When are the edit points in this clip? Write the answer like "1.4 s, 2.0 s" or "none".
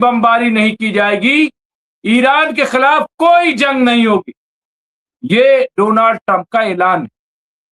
none